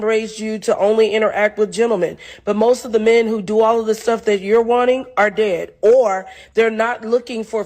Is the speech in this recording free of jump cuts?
no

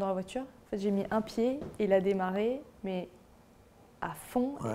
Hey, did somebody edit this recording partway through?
no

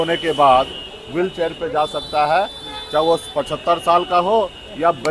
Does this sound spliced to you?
no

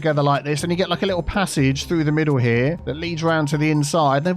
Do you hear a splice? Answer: yes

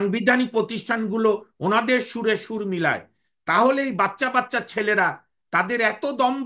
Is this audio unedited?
yes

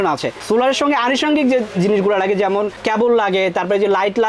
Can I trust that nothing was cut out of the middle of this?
yes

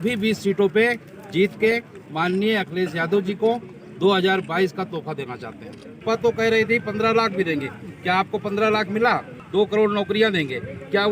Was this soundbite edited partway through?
yes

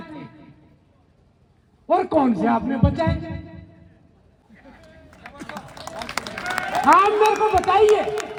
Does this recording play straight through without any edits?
yes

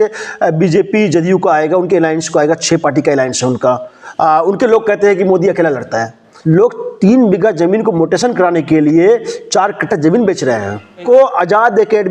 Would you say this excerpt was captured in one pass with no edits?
no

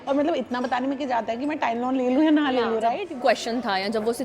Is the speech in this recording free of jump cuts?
no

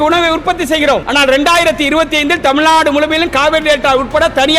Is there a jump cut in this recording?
yes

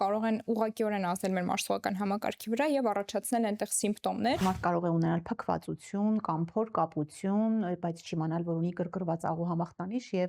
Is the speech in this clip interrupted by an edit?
yes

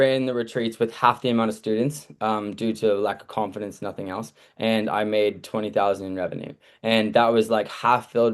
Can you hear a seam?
no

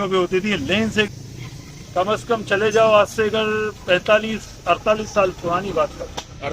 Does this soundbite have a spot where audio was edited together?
yes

